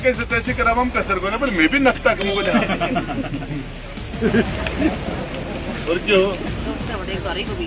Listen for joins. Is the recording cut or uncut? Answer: cut